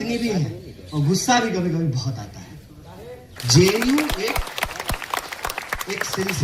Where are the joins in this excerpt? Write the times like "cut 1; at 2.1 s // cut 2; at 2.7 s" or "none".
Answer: cut 1; at 3.4 s